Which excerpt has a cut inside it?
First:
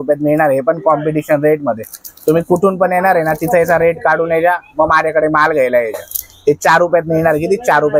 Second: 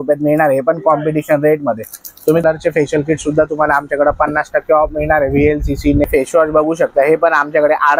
second; 2 cuts; at 2.4 s, 6.1 s

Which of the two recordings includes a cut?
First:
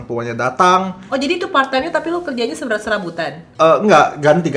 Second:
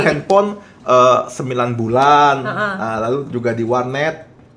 first; 2 cuts; at 1.0 s, 3.4 s

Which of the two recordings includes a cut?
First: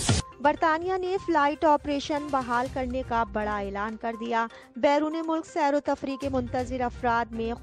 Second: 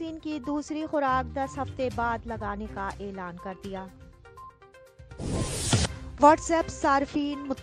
second; 2 cuts; at 4.5 s, 6.0 s

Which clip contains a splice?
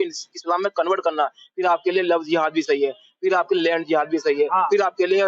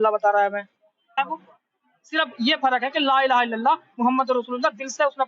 second; 1 cut; at 1.2 s

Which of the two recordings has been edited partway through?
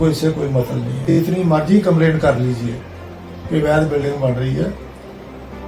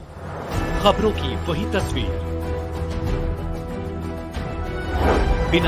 first; 1 cut; at 1.1 s

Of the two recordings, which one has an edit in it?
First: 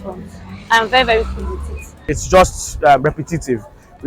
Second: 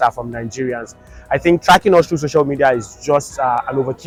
first; 1 cut; at 2.2 s

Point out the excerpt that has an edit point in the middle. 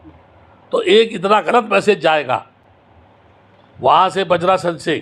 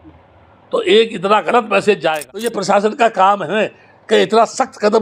second; 1 cut; at 2.4 s

